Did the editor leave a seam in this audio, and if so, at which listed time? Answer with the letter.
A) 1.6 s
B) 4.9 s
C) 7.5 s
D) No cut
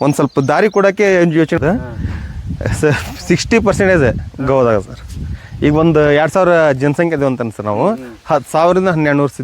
A